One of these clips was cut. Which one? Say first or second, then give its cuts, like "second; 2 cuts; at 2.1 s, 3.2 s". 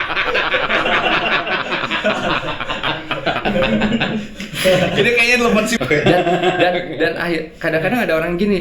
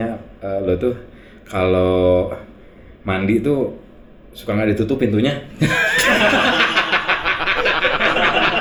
first; 1 cut; at 5.7 s